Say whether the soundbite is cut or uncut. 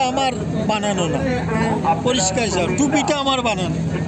uncut